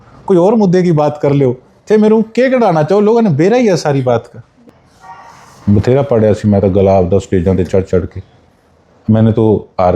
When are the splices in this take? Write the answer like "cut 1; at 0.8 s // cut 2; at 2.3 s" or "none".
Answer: cut 1; at 4.7 s